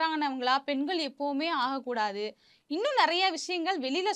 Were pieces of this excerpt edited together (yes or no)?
no